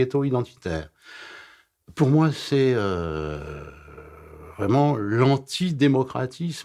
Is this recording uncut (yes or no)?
yes